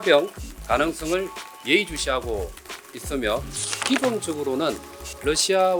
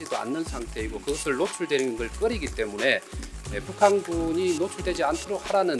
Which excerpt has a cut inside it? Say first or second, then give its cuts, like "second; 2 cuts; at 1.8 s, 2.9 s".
first; 1 cut; at 3.8 s